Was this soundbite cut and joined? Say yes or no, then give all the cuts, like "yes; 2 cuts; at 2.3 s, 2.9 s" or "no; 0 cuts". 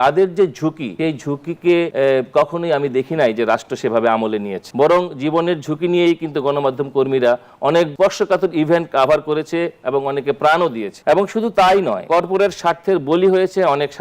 yes; 6 cuts; at 0.9 s, 1.9 s, 4.6 s, 7.9 s, 10.9 s, 12.0 s